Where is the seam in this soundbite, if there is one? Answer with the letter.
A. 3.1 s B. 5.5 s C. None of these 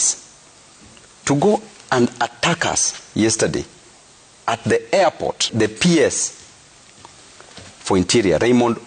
B